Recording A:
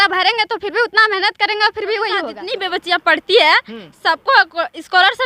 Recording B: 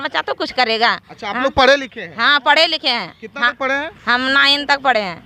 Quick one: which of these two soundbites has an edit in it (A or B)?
A